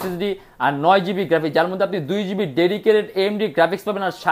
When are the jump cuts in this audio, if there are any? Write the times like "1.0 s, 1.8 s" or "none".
none